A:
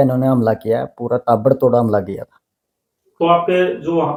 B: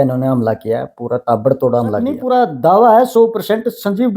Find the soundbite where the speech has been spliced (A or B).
B